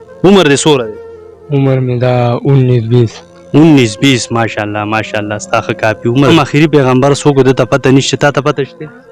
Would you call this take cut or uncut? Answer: cut